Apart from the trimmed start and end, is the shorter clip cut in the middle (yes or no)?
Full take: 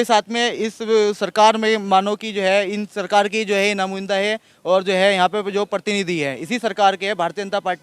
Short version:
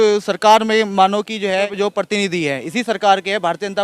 yes